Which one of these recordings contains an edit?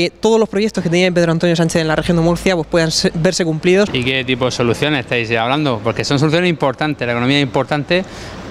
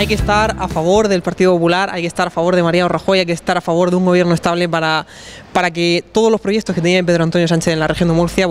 first; 1 cut; at 3.9 s

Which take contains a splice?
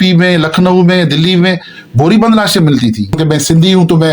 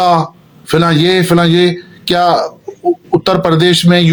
first; 1 cut; at 3.2 s

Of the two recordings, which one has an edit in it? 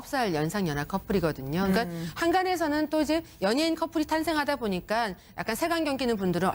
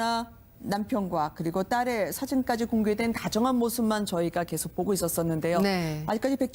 second; 1 cut; at 3.3 s

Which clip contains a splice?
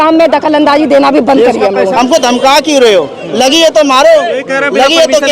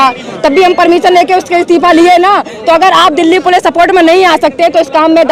first; 1 cut; at 1.9 s

